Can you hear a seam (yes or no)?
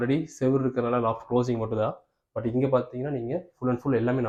no